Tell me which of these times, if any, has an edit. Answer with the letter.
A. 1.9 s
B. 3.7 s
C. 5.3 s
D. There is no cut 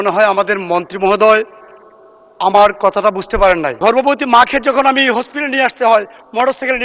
B